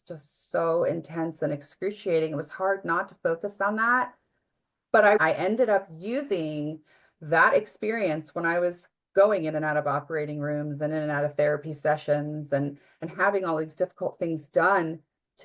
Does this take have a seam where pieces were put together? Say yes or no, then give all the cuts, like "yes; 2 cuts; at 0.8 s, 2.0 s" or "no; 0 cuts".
yes; 1 cut; at 5.2 s